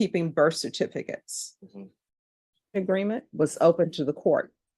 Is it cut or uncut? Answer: cut